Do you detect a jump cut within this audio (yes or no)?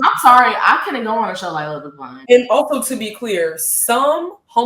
yes